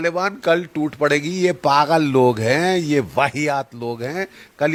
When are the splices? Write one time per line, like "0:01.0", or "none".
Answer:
none